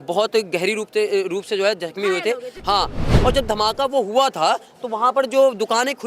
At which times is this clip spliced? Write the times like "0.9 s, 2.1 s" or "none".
3.1 s